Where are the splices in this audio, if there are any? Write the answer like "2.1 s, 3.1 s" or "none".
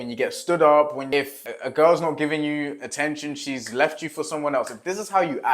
1.2 s